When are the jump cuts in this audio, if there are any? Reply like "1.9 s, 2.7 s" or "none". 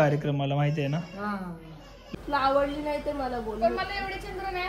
2.0 s

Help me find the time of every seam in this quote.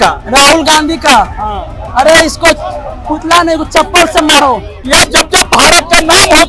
4.7 s

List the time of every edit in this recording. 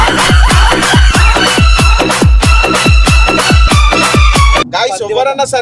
4.6 s

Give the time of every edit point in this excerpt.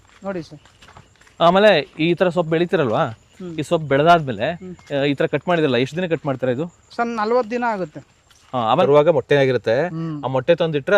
8.8 s

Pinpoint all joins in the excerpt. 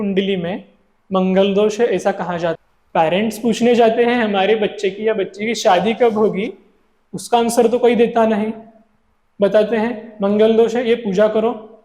2.7 s

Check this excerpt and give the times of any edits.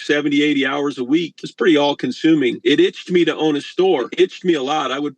1.4 s, 2.6 s, 4.1 s

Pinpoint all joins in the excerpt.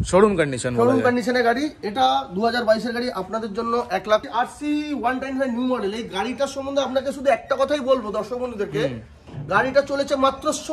4.2 s

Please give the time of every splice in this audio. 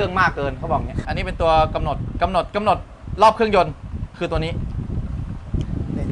1.0 s

